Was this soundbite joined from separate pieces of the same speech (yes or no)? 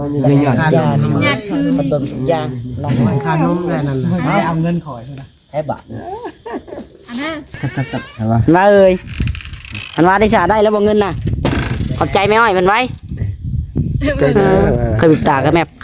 yes